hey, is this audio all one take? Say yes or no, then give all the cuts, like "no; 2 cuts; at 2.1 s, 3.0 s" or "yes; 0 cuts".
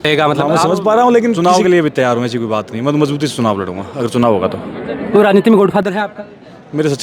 no; 1 cut; at 1.4 s